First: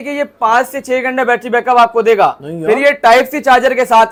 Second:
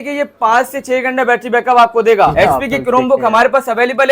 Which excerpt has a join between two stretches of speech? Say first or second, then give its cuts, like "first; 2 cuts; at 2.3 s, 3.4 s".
second; 1 cut; at 2.3 s